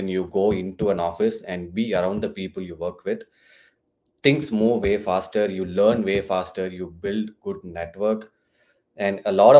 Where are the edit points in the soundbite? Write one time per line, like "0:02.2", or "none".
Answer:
none